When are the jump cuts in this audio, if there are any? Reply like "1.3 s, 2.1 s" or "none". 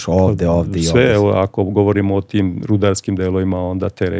none